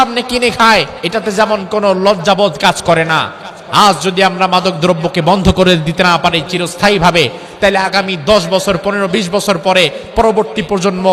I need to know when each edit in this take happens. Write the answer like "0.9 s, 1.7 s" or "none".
1.0 s